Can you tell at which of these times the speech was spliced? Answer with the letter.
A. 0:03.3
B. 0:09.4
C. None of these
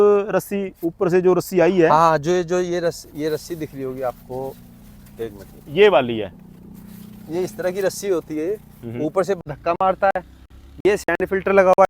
B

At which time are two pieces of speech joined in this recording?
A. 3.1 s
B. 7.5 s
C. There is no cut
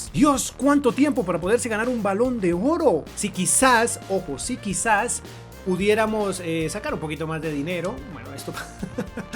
A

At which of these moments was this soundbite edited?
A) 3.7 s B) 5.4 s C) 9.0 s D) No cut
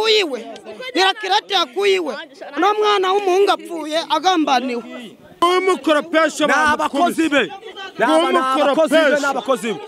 B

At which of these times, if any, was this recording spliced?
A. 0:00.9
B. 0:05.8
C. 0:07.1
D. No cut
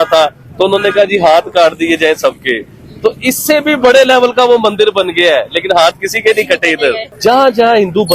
C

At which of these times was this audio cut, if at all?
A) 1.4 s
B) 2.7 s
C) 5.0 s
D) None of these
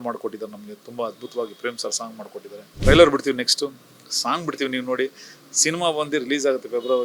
B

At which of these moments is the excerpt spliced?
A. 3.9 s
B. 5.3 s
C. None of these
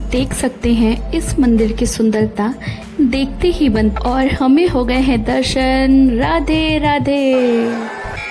A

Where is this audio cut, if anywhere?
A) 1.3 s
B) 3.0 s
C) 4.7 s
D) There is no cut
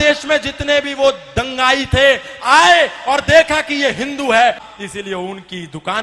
C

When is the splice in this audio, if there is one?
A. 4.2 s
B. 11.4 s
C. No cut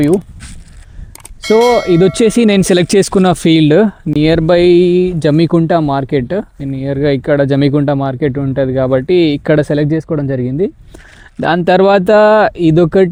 C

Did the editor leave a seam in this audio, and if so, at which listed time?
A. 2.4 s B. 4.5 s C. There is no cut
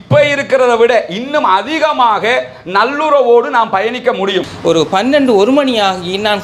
B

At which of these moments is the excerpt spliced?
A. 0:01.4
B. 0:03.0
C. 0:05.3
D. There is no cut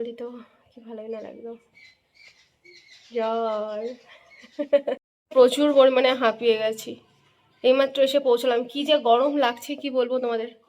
C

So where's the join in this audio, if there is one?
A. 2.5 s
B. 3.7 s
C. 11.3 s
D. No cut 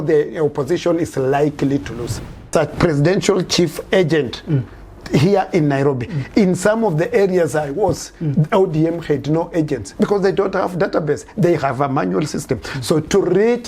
A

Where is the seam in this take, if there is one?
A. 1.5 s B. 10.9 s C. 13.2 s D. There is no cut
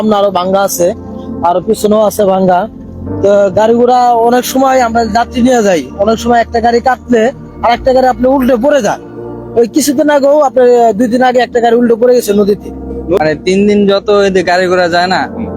C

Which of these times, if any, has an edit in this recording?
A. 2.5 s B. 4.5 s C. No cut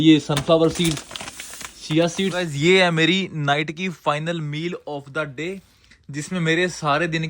A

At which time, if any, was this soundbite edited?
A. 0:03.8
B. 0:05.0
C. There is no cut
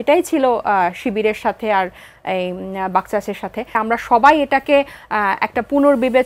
A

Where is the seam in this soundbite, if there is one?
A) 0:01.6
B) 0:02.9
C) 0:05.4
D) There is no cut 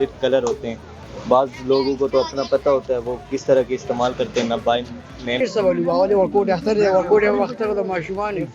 C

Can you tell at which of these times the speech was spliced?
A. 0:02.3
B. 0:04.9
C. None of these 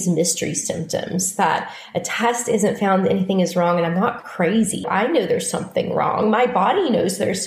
B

